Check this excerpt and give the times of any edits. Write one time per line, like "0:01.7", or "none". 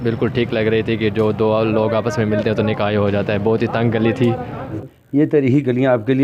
0:04.8